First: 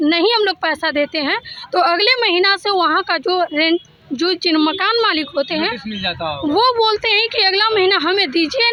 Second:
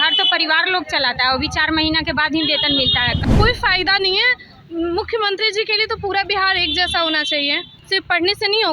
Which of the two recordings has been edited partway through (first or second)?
second